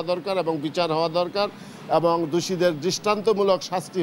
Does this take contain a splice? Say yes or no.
no